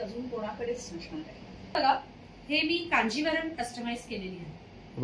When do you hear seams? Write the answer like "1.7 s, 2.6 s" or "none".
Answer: 1.7 s